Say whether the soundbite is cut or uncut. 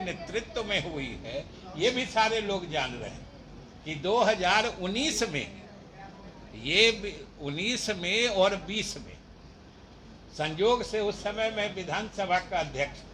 uncut